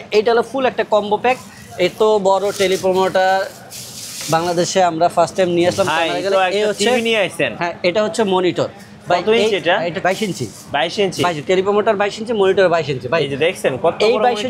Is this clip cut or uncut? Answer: cut